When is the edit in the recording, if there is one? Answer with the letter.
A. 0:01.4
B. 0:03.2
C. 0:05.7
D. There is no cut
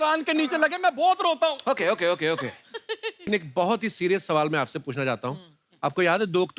B